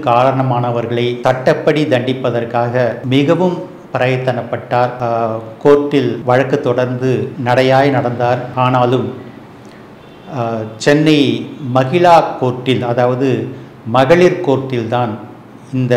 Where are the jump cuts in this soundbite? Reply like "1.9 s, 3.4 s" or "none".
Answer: 1.2 s, 3.0 s, 5.0 s, 6.2 s, 7.3 s, 8.5 s